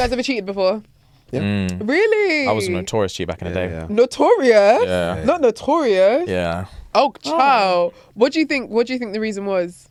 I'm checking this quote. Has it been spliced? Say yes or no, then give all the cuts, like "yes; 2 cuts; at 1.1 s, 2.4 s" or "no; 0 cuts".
no; 0 cuts